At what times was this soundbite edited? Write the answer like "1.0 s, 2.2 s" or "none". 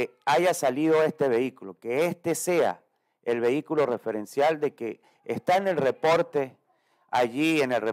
none